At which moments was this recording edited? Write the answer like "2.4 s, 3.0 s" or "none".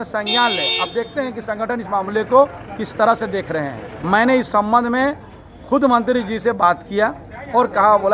3.9 s